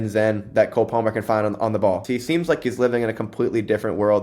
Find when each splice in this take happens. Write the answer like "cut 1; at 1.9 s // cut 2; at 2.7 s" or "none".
cut 1; at 2.0 s